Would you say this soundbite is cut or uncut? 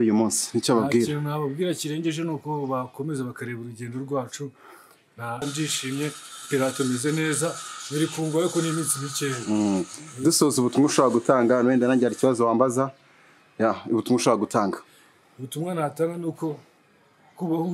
cut